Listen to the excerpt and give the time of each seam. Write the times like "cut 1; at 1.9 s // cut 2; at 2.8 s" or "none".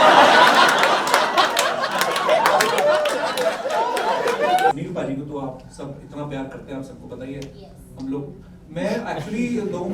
cut 1; at 4.7 s